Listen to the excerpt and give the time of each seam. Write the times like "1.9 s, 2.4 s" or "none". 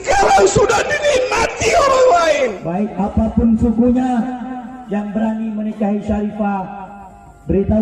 none